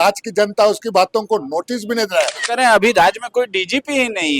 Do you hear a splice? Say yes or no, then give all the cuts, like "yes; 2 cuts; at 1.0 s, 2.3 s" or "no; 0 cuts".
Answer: yes; 1 cut; at 2.4 s